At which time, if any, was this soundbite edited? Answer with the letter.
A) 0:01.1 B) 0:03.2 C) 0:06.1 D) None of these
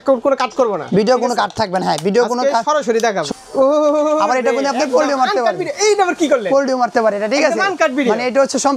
B